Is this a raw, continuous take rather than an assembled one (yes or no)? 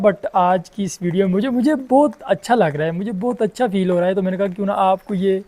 yes